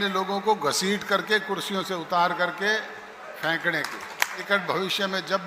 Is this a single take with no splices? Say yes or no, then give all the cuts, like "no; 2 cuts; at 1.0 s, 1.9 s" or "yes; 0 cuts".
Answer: no; 1 cut; at 4.4 s